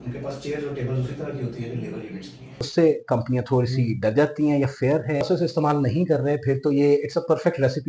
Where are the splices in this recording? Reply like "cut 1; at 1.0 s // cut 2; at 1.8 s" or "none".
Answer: cut 1; at 2.7 s // cut 2; at 5.2 s

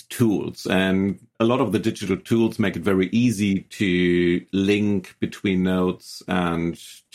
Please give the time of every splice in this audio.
cut 1; at 1.3 s

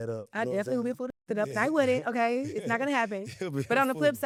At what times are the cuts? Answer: none

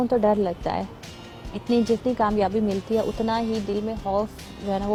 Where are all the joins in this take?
none

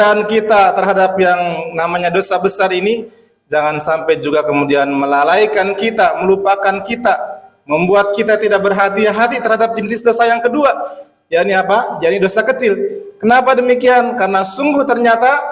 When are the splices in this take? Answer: cut 1; at 9.9 s

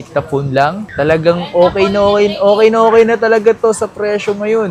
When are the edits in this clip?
none

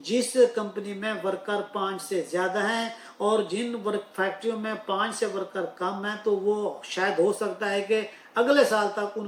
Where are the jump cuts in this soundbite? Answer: none

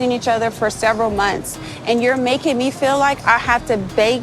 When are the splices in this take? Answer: none

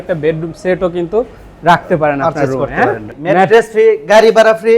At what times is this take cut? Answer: cut 1; at 3.1 s

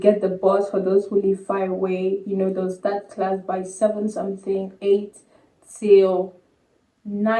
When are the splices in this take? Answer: none

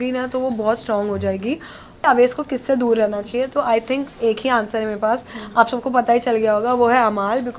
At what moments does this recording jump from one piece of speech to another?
cut 1; at 2.0 s

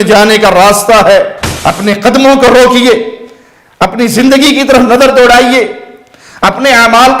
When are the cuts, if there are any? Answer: cut 1; at 1.4 s

